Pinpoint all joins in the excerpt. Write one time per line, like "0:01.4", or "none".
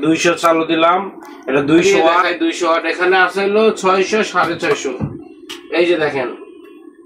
0:02.0